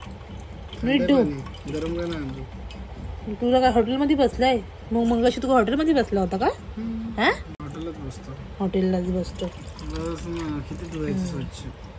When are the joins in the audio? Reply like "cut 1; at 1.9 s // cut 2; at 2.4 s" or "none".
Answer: none